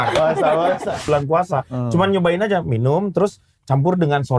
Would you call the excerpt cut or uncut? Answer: cut